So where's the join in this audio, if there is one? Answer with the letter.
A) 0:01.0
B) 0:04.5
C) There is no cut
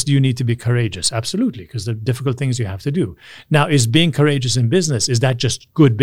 C